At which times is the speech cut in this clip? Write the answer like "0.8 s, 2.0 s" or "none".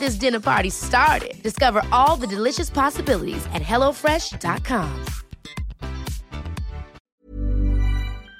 7.0 s

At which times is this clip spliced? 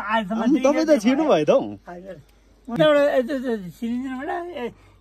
2.8 s

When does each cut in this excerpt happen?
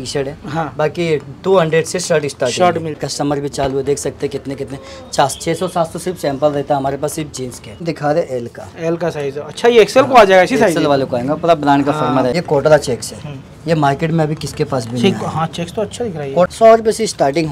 3.0 s, 7.8 s, 12.3 s, 16.5 s

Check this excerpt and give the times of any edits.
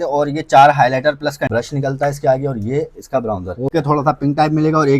1.5 s, 3.7 s

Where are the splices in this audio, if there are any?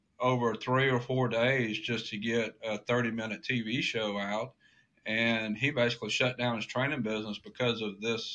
none

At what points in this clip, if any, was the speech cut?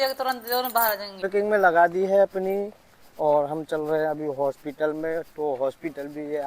1.3 s

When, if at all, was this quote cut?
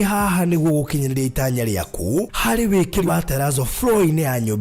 3.1 s

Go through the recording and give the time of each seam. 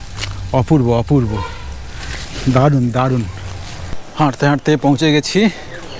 4.1 s

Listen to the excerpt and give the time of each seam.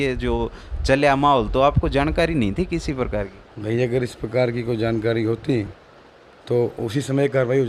none

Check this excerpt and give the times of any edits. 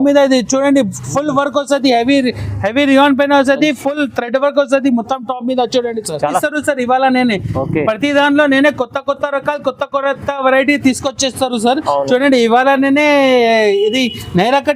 6.3 s

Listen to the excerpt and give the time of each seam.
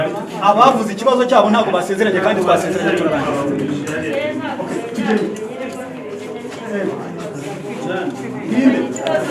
none

